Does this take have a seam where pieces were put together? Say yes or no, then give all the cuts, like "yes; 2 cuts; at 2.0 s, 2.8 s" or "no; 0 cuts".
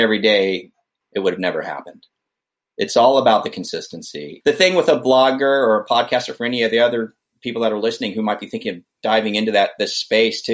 no; 0 cuts